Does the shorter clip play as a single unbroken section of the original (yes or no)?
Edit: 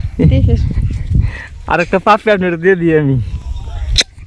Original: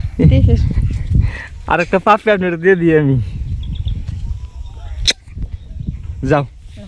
no